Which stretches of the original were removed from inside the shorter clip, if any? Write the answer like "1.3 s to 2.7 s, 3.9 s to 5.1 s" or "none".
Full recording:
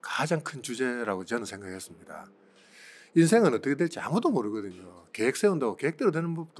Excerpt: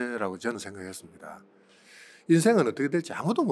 none